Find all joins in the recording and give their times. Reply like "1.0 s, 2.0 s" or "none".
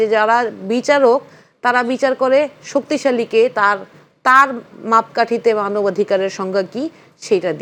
none

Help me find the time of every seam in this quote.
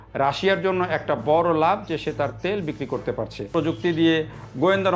3.5 s

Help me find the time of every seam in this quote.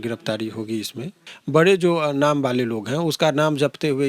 1.3 s

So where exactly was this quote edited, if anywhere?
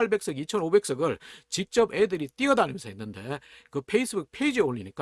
none

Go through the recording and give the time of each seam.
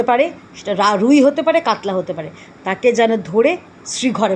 none

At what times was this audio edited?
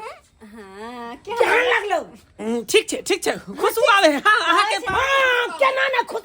2.3 s

